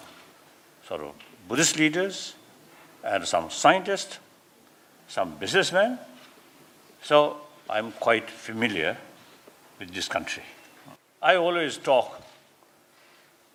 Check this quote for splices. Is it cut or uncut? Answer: uncut